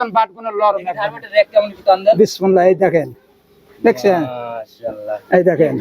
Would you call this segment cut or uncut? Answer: uncut